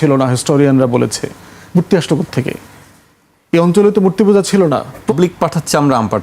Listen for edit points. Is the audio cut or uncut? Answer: cut